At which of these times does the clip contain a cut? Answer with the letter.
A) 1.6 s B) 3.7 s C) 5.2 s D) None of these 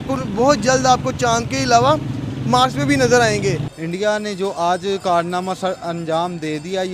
B